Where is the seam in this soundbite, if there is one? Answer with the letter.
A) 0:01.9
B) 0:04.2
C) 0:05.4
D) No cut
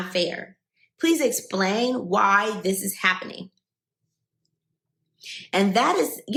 D